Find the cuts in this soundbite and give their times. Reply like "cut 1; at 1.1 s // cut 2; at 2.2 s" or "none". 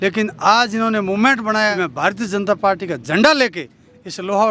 cut 1; at 1.7 s